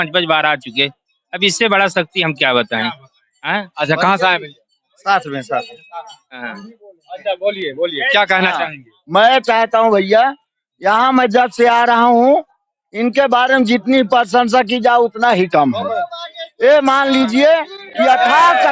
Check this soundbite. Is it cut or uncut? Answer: uncut